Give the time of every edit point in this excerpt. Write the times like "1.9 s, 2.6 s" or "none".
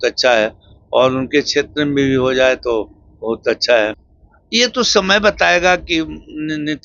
4.1 s